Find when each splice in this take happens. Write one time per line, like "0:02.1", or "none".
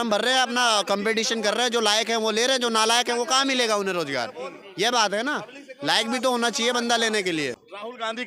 0:07.4